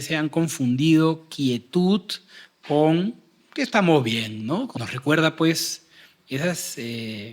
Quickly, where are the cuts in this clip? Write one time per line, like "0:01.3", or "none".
0:04.8